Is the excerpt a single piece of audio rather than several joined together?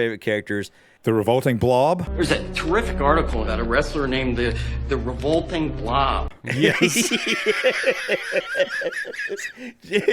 yes; 0 cuts

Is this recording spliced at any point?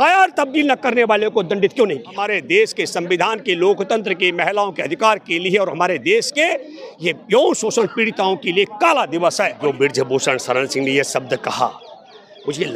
yes; 2 cuts; at 2.4 s, 9.5 s

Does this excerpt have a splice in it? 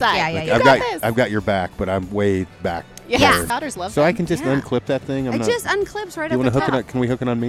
yes; 1 cut; at 3.5 s

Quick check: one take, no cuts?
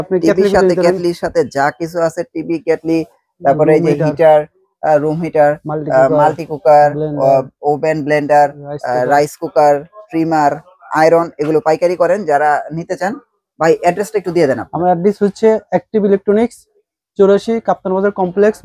yes; 0 cuts

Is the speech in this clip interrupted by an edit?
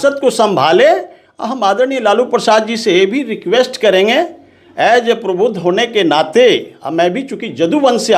no; 0 cuts

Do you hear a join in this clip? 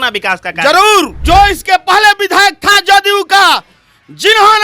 yes; 1 cut; at 1.2 s

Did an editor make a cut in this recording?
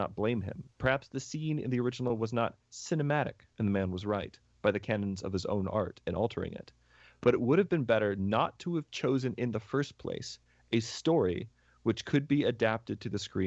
no; 0 cuts

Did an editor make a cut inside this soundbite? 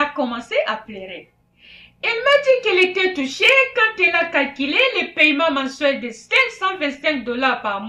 no; 0 cuts

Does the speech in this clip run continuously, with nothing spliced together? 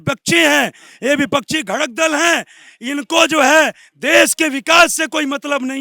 yes; 0 cuts

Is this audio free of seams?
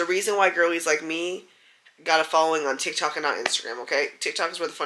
yes; 0 cuts

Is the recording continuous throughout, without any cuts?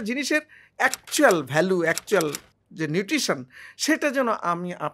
yes; 0 cuts

